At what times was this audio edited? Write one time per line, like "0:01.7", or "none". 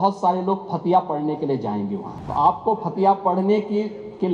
0:02.1